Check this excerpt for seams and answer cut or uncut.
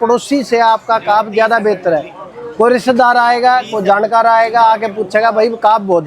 uncut